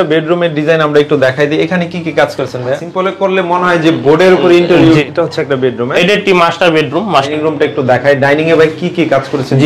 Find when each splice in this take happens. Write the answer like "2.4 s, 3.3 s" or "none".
2.8 s, 5.0 s, 7.3 s